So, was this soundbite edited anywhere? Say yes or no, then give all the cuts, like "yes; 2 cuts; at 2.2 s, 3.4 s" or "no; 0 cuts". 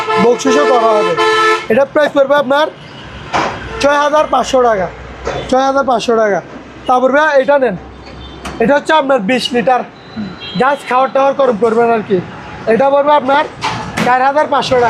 no; 0 cuts